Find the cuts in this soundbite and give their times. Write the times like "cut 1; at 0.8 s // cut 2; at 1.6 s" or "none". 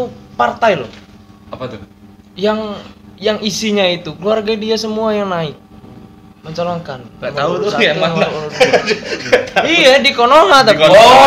none